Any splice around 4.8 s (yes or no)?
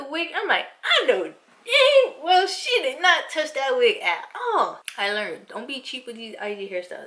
yes